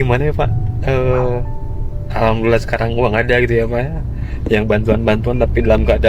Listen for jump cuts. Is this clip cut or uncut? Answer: uncut